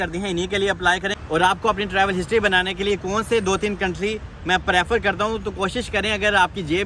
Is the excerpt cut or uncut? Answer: cut